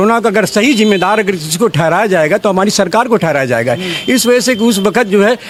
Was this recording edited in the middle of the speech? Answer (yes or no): no